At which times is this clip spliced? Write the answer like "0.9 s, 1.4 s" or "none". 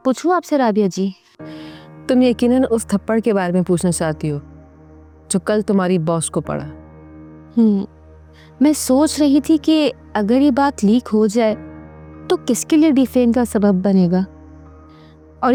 none